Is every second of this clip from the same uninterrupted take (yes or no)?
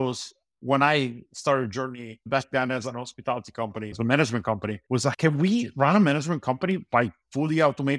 no